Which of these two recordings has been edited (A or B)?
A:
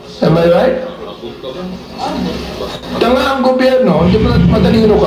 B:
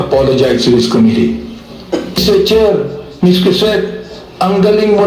B